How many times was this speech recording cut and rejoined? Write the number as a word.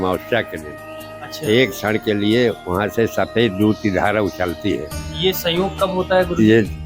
one